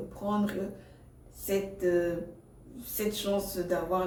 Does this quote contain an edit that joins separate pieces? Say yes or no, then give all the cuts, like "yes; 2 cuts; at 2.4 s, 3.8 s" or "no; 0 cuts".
no; 0 cuts